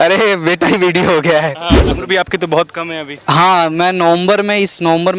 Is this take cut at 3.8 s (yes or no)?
no